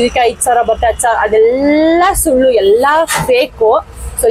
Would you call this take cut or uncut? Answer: uncut